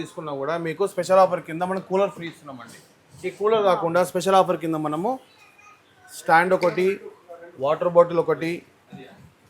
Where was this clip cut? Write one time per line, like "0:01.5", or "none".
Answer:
none